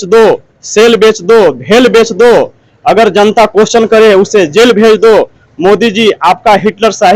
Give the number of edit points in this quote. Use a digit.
0